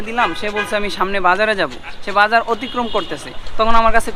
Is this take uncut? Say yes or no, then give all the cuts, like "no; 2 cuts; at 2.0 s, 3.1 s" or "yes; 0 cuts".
yes; 0 cuts